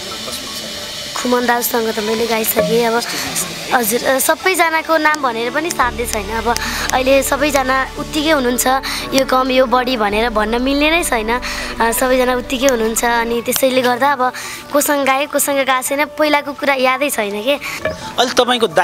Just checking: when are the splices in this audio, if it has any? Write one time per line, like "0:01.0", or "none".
0:17.7